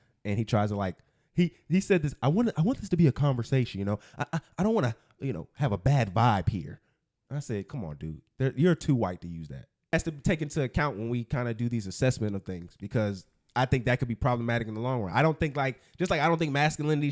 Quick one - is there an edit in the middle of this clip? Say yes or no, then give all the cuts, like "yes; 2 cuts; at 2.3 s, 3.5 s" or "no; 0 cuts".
yes; 1 cut; at 9.9 s